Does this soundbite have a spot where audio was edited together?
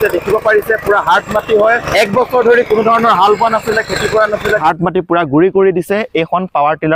yes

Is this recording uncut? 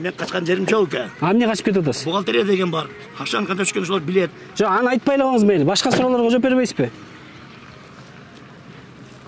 yes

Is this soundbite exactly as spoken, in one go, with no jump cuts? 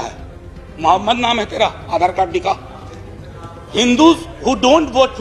yes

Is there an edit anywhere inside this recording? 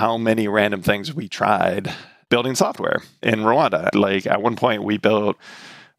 no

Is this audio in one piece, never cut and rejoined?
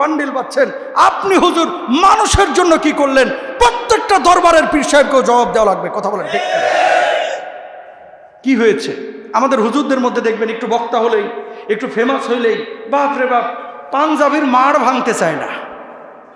yes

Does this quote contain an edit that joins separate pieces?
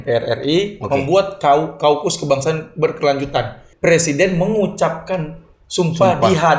yes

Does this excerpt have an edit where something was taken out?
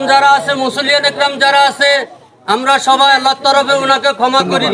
no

